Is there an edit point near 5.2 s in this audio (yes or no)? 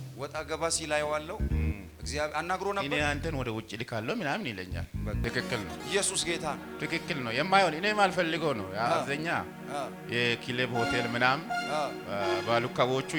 yes